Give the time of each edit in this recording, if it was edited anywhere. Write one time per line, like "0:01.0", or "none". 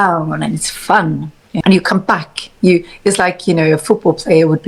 0:01.5